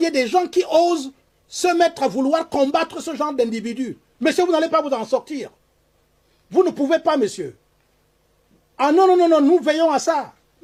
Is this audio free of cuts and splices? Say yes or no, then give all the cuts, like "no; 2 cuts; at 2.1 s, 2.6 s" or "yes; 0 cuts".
yes; 0 cuts